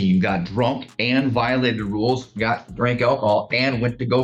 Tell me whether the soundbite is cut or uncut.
uncut